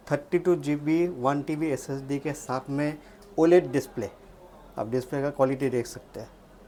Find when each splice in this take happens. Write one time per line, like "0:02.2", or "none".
none

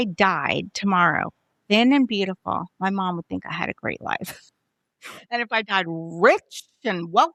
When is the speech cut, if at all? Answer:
none

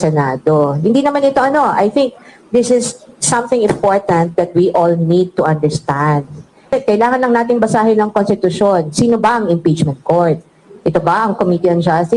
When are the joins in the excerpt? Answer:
0:06.7

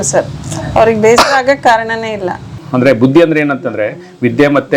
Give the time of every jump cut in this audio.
0:02.6

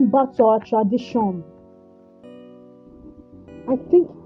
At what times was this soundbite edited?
none

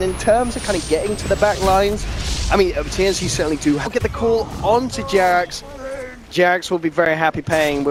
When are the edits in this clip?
none

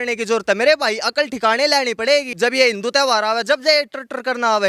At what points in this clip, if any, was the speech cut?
0:02.3

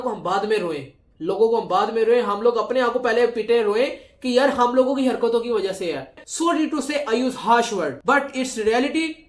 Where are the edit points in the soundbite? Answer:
0:06.2

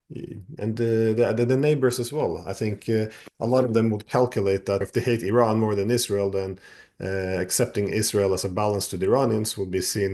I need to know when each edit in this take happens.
0:04.8

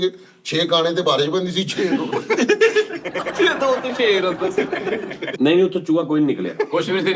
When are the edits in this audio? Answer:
0:05.3

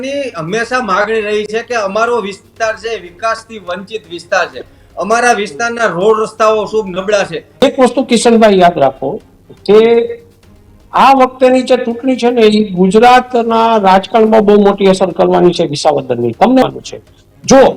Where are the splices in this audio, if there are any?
0:07.6
0:16.6

